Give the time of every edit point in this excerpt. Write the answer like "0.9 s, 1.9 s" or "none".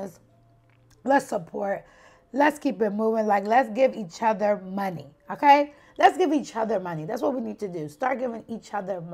none

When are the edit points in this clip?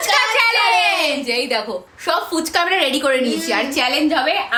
none

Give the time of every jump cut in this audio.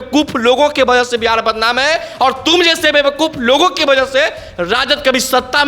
none

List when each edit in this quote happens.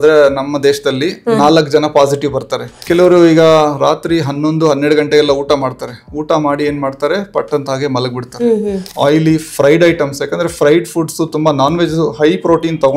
2.8 s, 8.8 s

